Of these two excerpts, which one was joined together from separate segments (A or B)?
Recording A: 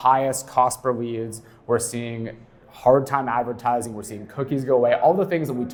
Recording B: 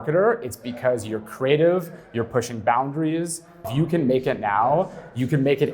B